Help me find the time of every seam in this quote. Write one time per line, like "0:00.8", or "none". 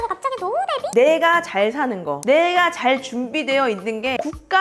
0:00.9

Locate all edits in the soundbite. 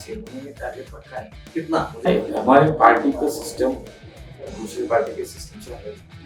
0:02.0

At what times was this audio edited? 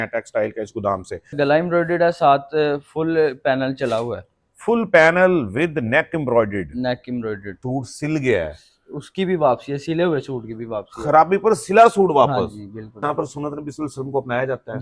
0:01.3
0:07.5
0:13.0

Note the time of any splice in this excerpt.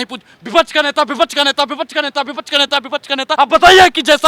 0:03.4

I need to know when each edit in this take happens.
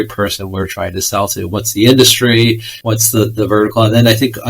0:02.7

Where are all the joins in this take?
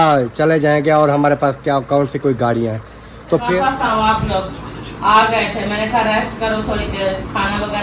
0:03.4

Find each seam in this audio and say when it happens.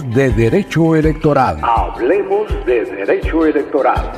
none

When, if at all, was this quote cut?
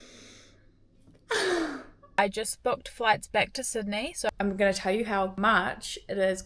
0:02.1
0:04.3
0:05.3

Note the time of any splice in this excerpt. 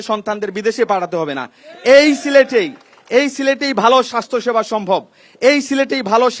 none

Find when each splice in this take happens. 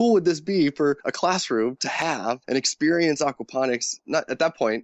0:01.1
0:02.4
0:04.0

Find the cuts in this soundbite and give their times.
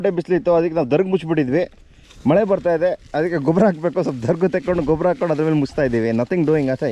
none

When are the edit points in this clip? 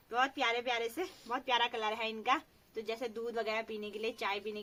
none

